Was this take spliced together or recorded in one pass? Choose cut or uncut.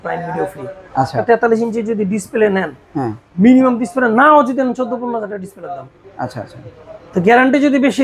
cut